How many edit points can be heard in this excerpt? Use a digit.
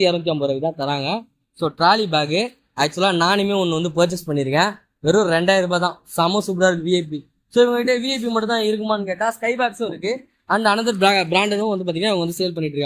0